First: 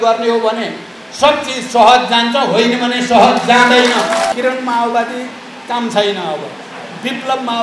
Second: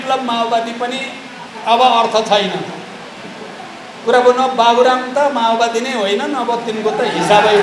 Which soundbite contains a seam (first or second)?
first